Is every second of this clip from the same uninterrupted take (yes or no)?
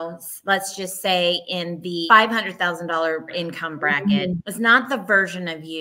no